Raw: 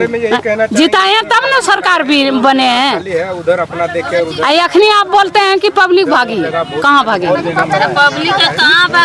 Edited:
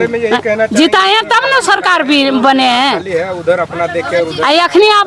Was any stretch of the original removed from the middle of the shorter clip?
no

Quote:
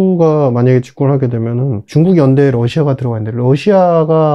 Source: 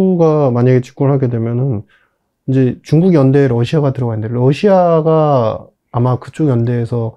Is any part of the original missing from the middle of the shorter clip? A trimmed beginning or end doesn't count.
yes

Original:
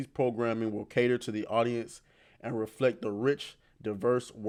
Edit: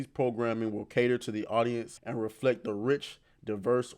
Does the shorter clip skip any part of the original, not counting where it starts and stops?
yes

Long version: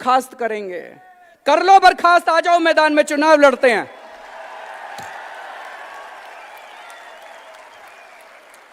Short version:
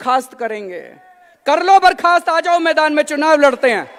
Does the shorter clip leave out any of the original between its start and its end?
no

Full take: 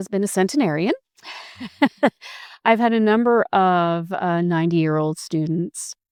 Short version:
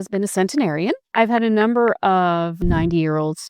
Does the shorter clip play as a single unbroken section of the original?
no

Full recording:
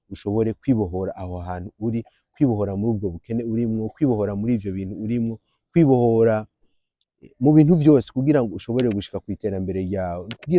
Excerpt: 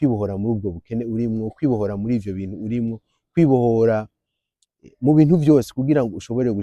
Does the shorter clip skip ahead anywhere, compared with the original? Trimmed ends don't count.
no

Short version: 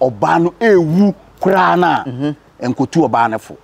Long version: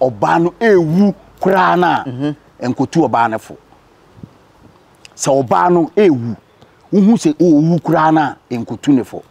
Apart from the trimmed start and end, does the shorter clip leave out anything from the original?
no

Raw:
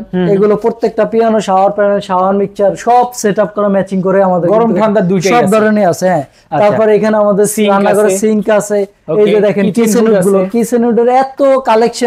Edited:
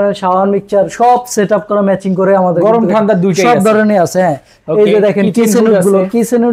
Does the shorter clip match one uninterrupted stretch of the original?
no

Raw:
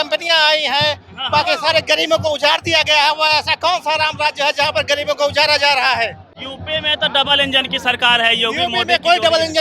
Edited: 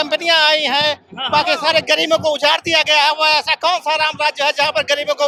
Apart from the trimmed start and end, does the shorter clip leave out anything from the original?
no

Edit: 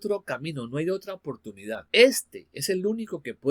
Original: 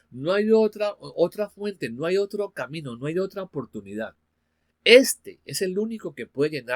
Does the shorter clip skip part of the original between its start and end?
yes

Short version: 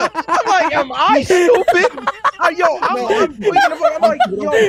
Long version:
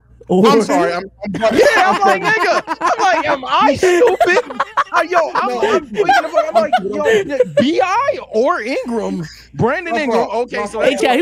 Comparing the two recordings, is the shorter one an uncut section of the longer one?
yes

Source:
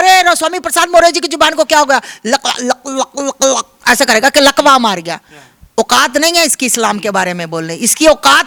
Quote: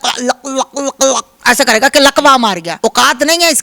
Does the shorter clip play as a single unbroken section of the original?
no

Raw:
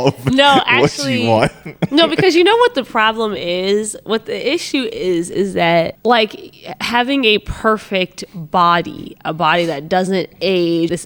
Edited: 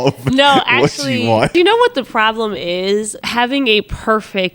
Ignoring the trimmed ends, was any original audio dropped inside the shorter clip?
yes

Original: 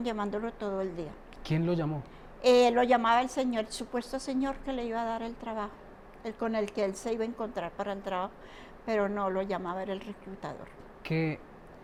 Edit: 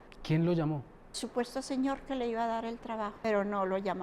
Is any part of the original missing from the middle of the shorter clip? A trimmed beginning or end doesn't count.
yes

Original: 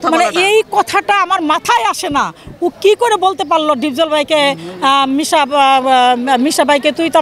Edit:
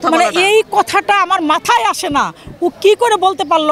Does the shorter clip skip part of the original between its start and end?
no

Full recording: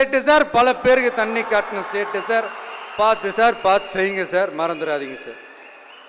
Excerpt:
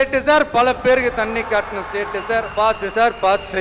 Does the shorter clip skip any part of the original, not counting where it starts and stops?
yes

